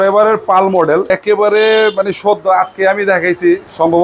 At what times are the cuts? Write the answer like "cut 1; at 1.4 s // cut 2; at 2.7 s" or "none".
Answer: cut 1; at 1.1 s